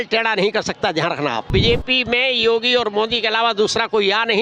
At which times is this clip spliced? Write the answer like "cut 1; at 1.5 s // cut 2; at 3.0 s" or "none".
cut 1; at 1.5 s